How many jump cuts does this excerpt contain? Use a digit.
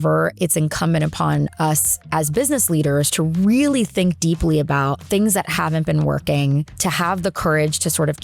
3